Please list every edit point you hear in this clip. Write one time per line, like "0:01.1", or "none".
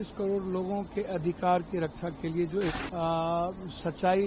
0:02.8